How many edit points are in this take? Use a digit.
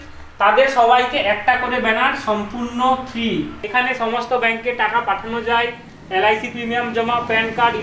1